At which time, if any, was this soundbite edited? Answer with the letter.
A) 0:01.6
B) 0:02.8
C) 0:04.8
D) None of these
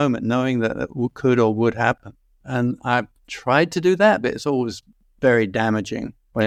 D